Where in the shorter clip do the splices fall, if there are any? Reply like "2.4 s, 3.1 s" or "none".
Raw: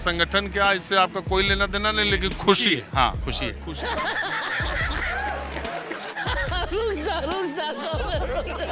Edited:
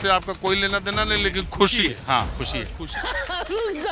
2.9 s